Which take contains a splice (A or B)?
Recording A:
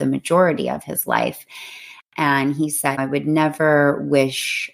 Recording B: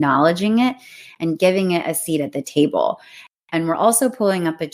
A